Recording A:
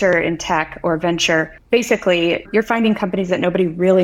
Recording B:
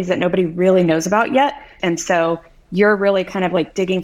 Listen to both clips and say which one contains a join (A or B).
B